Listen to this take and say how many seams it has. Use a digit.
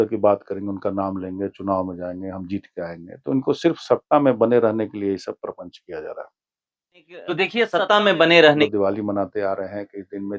1